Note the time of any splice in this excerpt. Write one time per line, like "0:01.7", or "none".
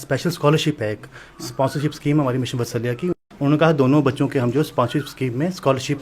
0:03.2